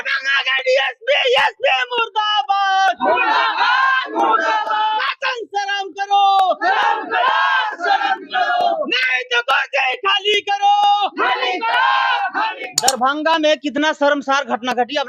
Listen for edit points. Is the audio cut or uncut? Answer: cut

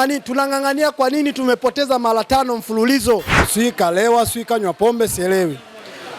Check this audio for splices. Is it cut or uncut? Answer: cut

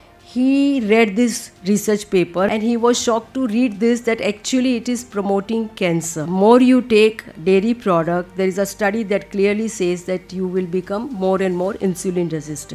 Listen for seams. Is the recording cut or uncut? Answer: cut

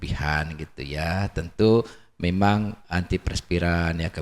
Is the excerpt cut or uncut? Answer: uncut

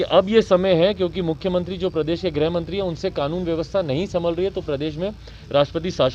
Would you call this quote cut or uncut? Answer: uncut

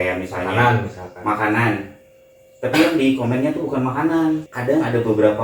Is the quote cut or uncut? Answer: cut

